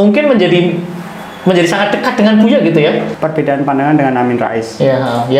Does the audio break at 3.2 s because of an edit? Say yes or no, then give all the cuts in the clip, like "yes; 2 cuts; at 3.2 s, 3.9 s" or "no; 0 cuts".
yes; 1 cut; at 3.2 s